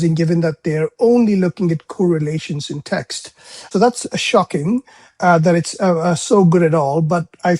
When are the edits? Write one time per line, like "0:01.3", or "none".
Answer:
0:03.7

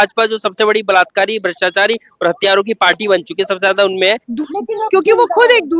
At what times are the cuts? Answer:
0:04.3

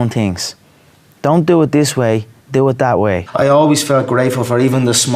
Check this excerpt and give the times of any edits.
0:03.3

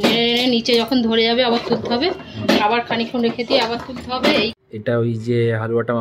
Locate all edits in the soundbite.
0:04.5

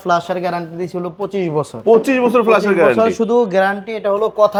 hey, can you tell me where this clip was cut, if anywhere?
none

